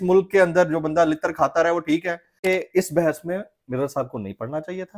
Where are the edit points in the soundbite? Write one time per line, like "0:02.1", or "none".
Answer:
0:02.4